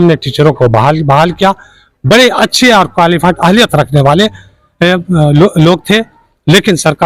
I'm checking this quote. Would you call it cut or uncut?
uncut